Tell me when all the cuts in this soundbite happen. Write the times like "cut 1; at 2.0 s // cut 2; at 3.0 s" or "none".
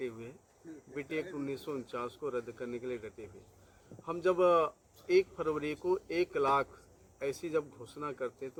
none